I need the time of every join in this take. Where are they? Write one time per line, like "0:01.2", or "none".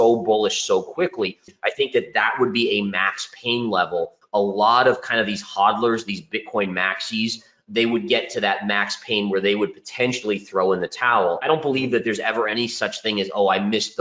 0:01.5
0:04.2
0:11.4